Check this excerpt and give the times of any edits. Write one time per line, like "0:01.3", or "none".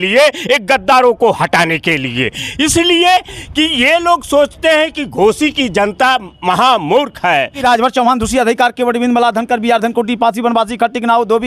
0:07.6